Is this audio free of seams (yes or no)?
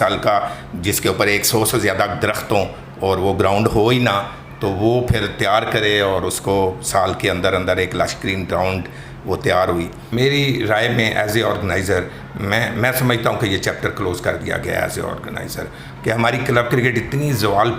no